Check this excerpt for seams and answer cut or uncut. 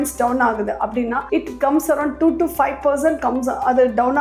uncut